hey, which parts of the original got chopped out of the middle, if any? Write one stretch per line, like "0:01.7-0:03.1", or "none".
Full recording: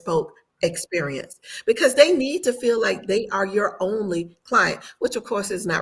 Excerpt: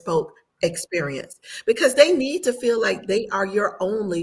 none